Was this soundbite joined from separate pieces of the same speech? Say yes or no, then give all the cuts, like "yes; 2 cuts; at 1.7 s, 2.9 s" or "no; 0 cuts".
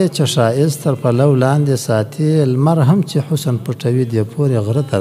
no; 0 cuts